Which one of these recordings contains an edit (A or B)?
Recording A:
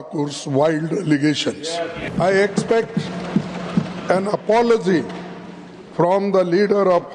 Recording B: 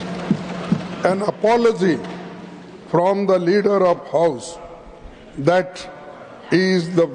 A